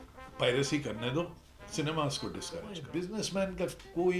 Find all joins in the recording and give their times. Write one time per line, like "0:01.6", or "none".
0:02.8

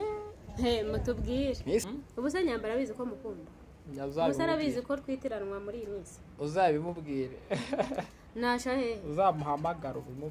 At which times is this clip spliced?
0:01.8

